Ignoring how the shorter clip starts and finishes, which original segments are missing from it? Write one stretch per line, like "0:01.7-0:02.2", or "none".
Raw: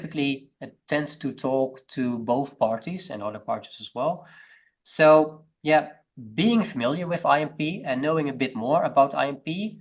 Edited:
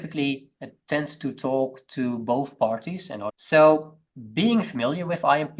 0:03.3-0:04.8
0:05.5-0:06.0